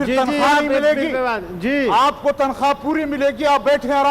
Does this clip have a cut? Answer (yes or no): no